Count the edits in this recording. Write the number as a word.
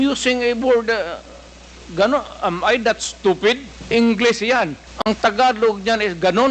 two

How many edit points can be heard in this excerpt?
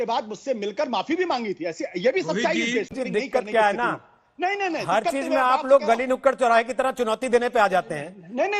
one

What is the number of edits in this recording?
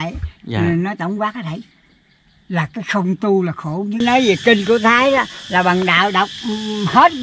one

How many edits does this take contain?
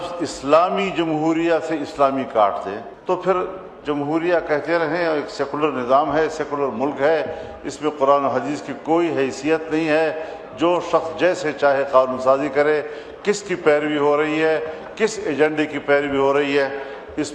one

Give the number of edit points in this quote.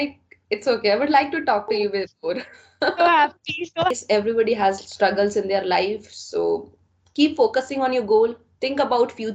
one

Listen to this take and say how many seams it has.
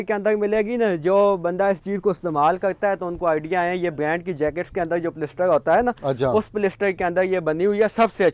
zero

